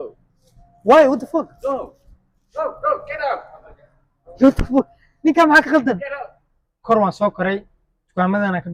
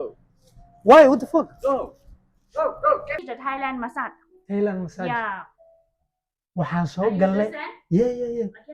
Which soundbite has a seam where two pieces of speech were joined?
second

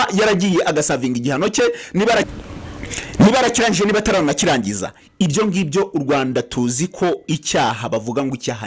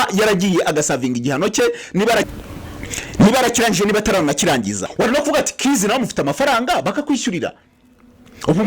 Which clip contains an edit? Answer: second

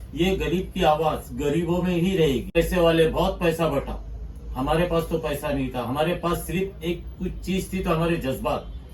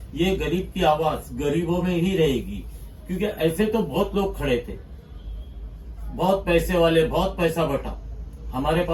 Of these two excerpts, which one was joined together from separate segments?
first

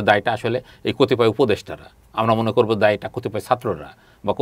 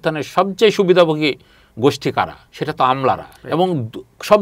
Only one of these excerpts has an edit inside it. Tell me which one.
second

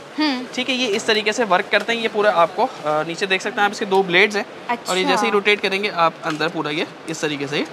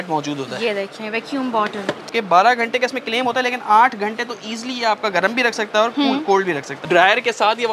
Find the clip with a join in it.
second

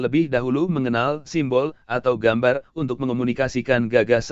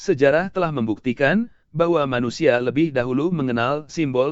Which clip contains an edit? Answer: first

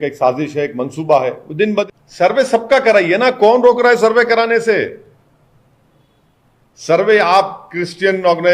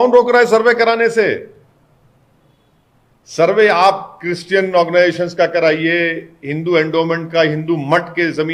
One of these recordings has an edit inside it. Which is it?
first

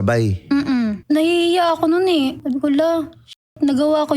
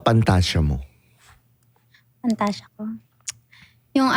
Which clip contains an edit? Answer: first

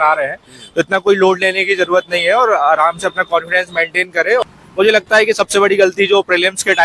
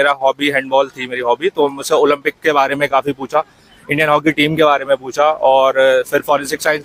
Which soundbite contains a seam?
first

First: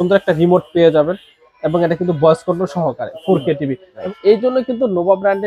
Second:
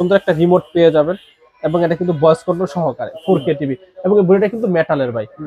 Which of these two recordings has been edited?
first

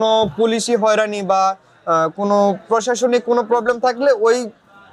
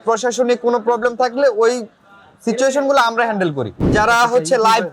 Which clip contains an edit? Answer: second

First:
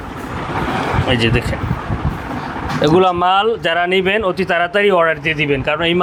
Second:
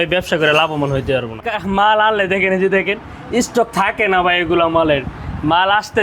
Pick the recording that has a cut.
second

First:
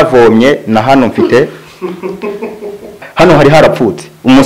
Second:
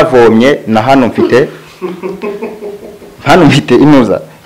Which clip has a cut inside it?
first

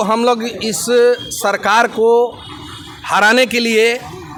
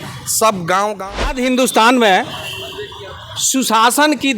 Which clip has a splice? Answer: second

